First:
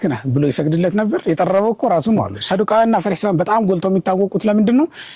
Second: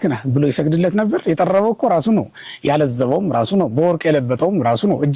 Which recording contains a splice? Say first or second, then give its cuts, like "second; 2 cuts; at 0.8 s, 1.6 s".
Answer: first; 1 cut; at 2.3 s